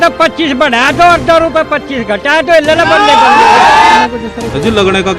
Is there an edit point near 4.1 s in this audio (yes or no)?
yes